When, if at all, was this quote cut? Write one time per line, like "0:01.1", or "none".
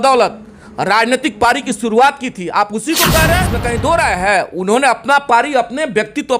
0:03.6